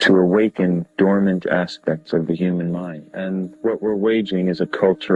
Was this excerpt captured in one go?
yes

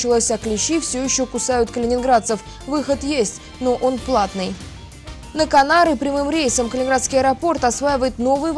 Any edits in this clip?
no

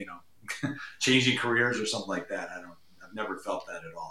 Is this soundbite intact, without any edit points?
yes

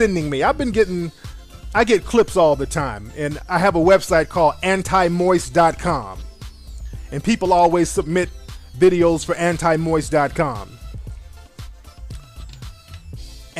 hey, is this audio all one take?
no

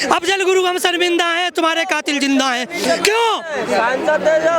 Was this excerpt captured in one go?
yes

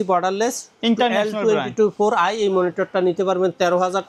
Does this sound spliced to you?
no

